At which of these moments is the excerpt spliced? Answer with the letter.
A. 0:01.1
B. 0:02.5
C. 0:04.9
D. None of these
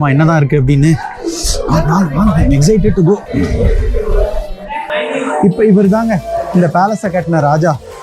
C